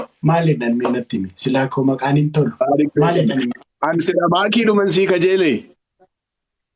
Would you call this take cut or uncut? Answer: uncut